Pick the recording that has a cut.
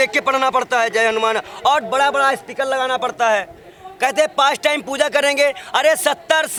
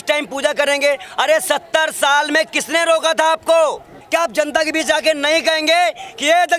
second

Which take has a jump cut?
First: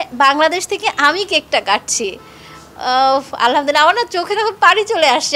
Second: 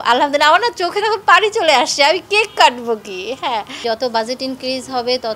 second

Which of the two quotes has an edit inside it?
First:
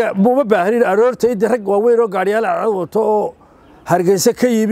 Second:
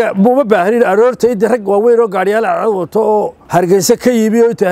second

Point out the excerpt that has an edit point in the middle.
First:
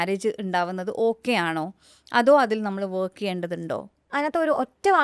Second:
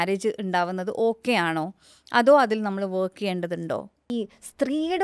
second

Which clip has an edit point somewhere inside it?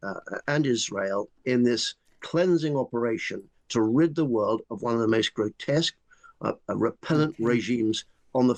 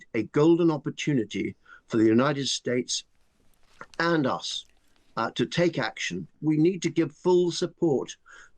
second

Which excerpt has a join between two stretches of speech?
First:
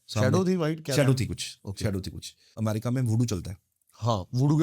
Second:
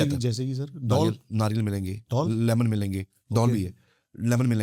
first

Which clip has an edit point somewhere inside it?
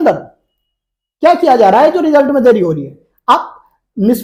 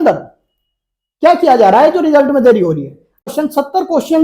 second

